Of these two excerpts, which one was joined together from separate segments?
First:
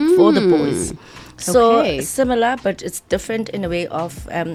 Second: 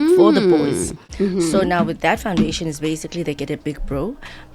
second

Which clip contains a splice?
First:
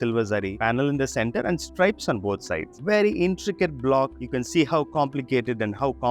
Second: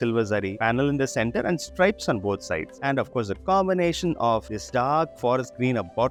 first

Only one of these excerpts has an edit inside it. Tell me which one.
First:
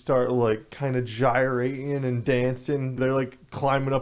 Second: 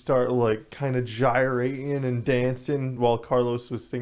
first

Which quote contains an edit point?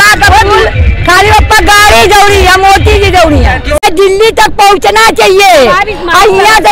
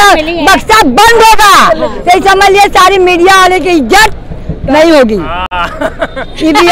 first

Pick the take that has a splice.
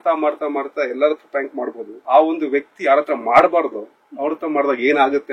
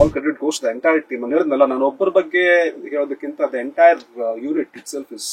first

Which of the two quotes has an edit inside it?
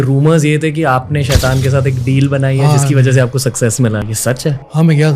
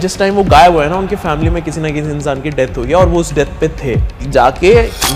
second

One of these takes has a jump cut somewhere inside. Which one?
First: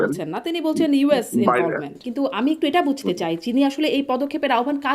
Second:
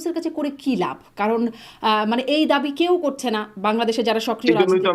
first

